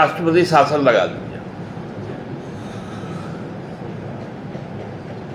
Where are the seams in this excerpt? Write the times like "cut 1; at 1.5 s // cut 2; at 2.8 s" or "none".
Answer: none